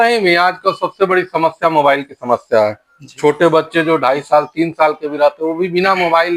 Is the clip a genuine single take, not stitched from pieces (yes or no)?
yes